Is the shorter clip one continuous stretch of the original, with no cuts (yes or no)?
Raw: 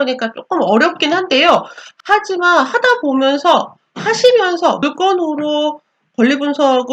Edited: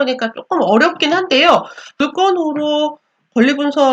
no